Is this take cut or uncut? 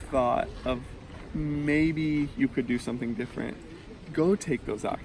uncut